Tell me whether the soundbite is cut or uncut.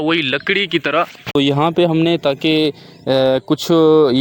cut